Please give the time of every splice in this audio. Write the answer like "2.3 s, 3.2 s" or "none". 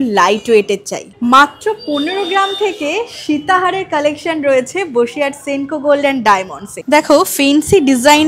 1.2 s, 6.7 s